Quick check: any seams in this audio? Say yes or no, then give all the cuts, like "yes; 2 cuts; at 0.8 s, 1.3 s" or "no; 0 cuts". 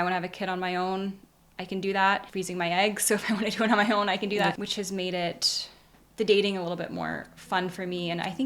yes; 2 cuts; at 2.3 s, 4.6 s